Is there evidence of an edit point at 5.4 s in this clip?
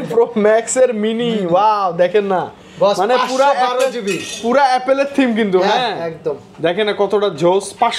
no; 0 cuts

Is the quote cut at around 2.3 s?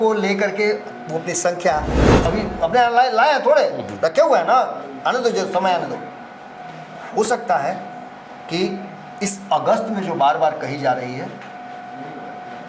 yes; 1 cut; at 2.3 s

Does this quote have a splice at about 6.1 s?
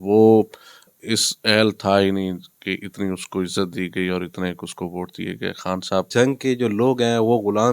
yes; 2 cuts; at 0.9 s, 6.1 s

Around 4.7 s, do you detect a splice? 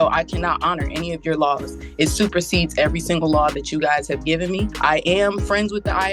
yes; 1 cut; at 4.7 s

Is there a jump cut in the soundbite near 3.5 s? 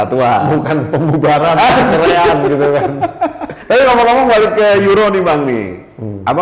yes; 1 cut; at 3.5 s

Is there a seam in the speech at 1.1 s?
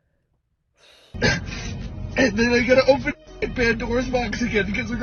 yes; 1 cut; at 1.1 s

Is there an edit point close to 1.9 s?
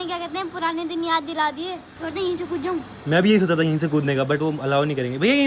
yes; 1 cut; at 1.9 s

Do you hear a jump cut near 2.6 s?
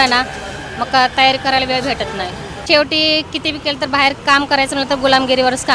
yes; 1 cut; at 2.6 s

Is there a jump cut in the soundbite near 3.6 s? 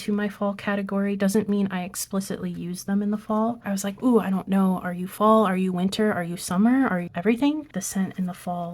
yes; 2 cuts; at 3.6 s, 7.8 s

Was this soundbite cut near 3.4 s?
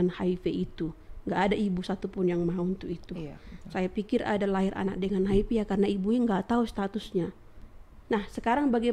no; 1 cut; at 7.9 s

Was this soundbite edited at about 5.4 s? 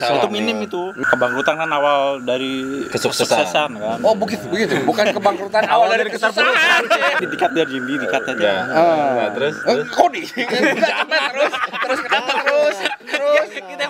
no; 2 cuts; at 0.9 s, 7.2 s

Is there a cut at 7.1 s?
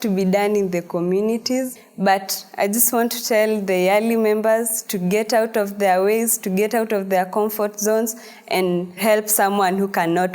no; 2 cuts; at 1.7 s, 9.0 s

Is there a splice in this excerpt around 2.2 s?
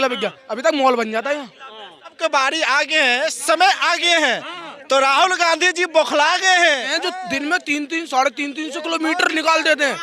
yes; 2 cuts; at 2.2 s, 6.9 s

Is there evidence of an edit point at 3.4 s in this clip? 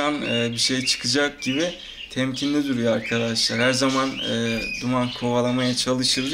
no; 0 cuts

